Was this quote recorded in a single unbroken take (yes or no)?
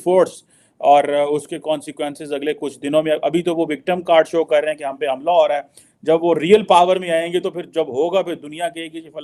yes